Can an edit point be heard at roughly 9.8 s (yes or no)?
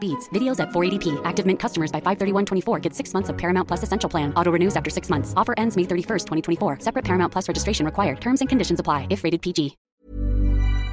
yes